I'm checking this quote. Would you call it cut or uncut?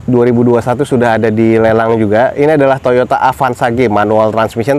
uncut